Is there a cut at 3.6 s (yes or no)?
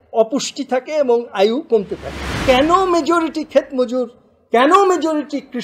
no